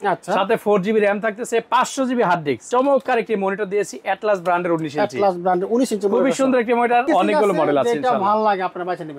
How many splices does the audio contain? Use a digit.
2